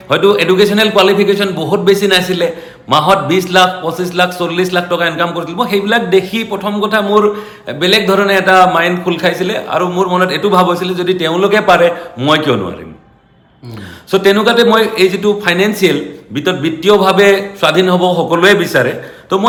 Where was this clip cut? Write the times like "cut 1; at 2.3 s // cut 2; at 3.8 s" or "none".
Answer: none